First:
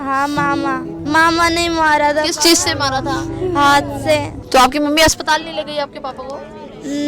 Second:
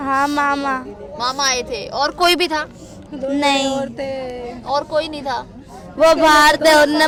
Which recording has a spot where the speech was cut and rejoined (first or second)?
first